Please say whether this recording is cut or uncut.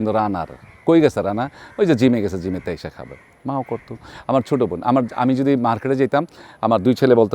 uncut